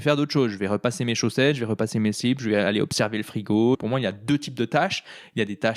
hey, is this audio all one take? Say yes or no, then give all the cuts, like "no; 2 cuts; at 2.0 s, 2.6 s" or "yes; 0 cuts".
no; 1 cut; at 3.7 s